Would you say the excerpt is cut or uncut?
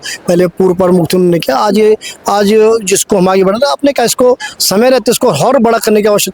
uncut